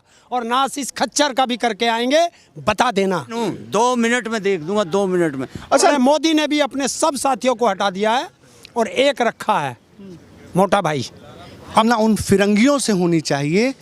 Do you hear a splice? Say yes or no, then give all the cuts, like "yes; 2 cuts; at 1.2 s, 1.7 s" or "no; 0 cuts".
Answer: yes; 3 cuts; at 3.3 s, 5.9 s, 11.8 s